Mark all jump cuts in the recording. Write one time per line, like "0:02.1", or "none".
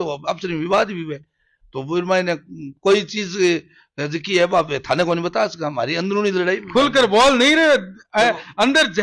none